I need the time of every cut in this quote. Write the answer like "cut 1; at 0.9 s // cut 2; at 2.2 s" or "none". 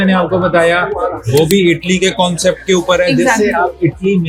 none